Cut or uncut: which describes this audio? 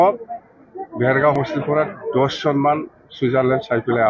cut